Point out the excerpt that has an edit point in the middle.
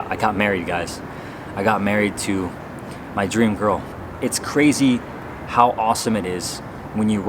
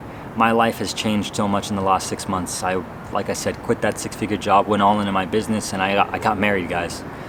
first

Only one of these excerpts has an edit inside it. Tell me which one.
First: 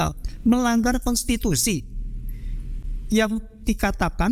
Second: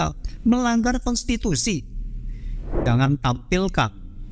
second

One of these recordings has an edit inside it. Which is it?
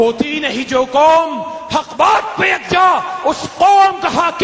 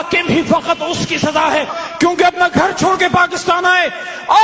second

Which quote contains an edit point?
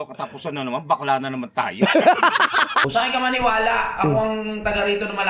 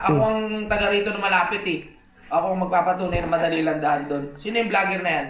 first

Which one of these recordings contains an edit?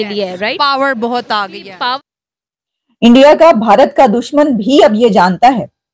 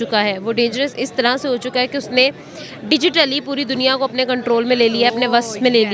first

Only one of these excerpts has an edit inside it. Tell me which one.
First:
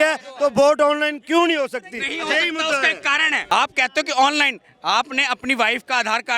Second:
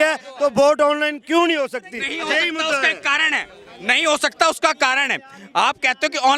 first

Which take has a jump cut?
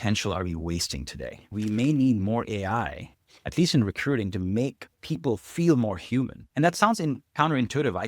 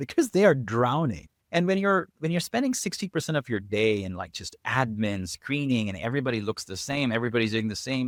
first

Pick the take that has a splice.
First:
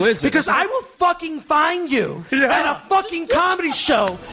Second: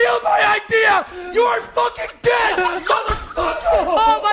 second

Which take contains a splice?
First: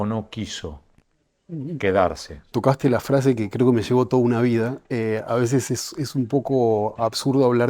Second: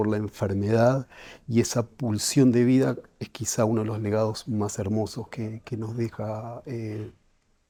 first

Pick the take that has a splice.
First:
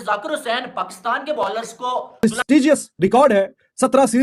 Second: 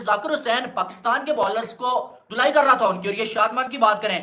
first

